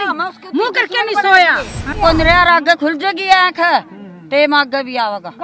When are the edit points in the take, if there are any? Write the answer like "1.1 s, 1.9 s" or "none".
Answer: 2.0 s